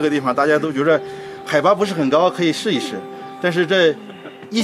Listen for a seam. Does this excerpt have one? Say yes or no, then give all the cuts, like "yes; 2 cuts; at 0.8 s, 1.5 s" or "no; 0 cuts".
no; 0 cuts